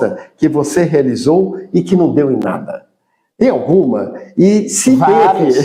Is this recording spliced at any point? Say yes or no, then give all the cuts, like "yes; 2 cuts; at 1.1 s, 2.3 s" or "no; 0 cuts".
no; 0 cuts